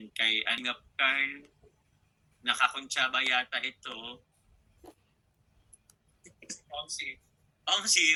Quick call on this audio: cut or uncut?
uncut